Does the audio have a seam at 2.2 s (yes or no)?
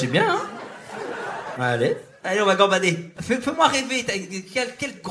no